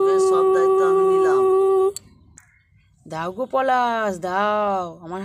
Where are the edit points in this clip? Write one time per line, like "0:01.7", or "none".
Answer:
none